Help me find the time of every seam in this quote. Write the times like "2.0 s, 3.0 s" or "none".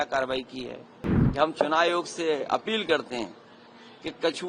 1.1 s